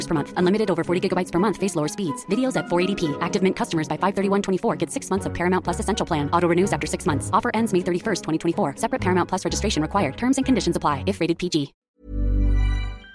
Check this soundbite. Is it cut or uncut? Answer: cut